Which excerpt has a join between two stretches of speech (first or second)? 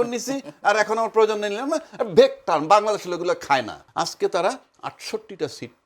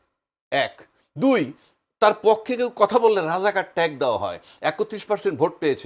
first